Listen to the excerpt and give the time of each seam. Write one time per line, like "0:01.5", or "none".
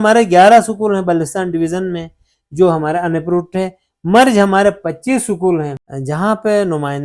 0:05.8